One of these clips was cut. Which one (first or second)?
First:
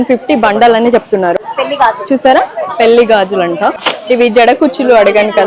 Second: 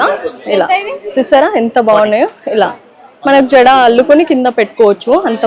first